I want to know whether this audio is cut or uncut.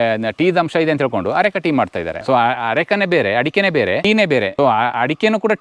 cut